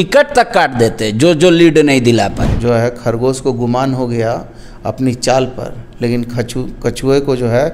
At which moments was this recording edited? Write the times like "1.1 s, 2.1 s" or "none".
2.5 s